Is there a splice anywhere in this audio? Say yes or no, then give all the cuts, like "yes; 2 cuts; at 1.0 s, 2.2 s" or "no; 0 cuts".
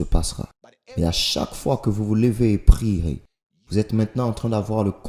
no; 0 cuts